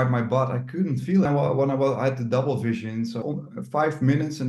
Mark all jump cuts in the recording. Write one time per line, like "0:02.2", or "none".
0:01.3
0:03.2